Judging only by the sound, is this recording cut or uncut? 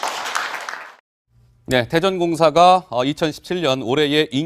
cut